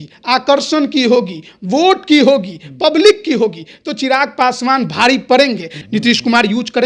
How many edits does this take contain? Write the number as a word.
one